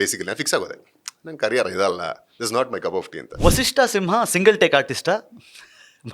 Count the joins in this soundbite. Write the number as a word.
one